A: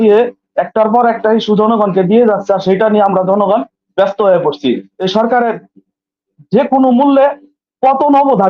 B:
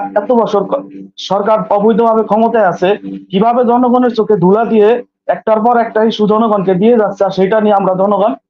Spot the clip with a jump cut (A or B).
A